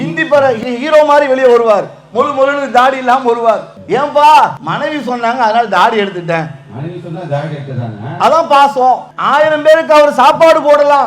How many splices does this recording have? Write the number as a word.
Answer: three